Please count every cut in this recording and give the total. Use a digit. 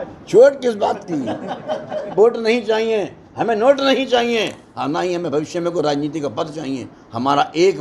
1